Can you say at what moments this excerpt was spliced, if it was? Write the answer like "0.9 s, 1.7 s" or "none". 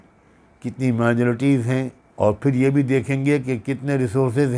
2.0 s